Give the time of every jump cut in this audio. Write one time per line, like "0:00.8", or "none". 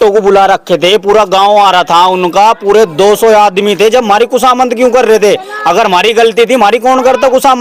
none